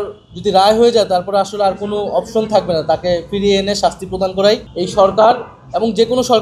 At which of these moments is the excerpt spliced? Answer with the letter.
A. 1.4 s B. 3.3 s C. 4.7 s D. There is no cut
C